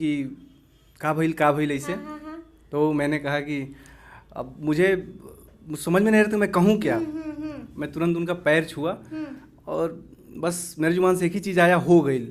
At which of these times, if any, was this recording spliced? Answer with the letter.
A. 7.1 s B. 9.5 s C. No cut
C